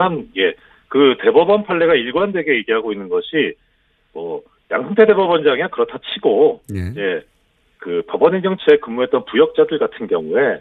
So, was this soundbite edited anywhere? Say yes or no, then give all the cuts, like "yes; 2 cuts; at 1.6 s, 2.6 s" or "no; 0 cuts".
no; 0 cuts